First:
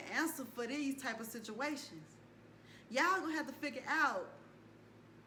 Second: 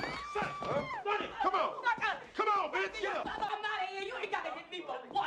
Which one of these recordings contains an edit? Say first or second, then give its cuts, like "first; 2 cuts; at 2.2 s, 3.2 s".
second; 1 cut; at 3.5 s